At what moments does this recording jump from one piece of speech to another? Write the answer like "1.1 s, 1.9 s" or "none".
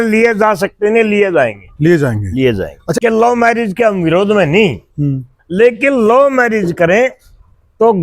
3.0 s

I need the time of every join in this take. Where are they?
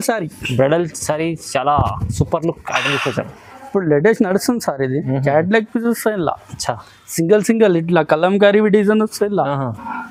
none

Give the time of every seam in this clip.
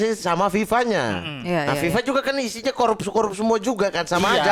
none

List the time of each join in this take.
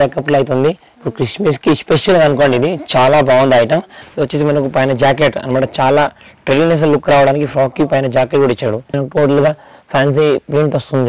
4.0 s, 9.0 s

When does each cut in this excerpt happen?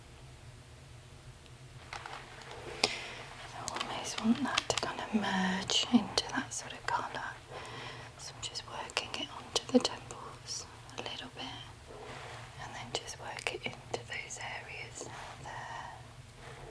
1.8 s, 12.1 s

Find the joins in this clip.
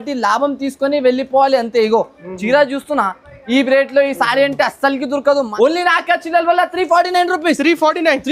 5.5 s

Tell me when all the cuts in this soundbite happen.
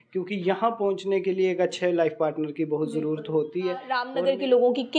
4.1 s

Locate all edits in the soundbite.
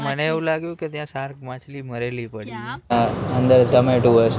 2.9 s

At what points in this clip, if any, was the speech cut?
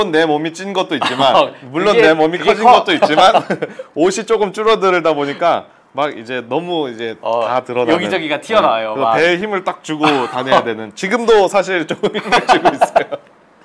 none

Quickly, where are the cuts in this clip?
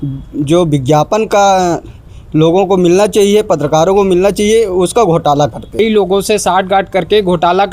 5.8 s

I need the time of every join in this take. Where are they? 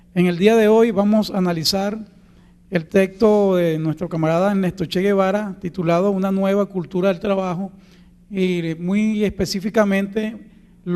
8.8 s

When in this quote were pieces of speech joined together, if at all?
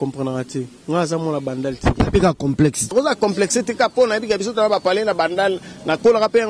2.9 s

